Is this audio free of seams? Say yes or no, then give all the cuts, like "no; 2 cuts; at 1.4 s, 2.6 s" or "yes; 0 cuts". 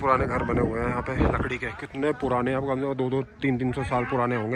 yes; 0 cuts